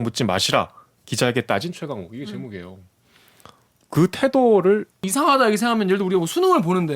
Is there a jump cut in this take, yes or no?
yes